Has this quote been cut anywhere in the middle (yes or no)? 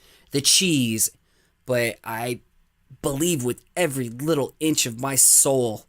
yes